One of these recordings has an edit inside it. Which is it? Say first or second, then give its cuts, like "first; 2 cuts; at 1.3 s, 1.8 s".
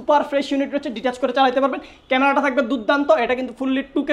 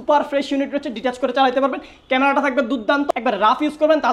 second; 1 cut; at 3.1 s